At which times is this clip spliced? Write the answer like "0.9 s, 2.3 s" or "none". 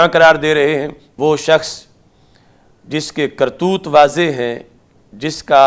1.0 s